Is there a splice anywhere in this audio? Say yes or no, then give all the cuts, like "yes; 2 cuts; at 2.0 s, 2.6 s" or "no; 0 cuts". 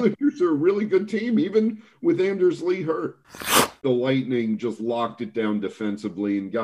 yes; 1 cut; at 3.8 s